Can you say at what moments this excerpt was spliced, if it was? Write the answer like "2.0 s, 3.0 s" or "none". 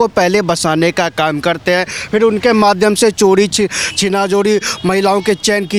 none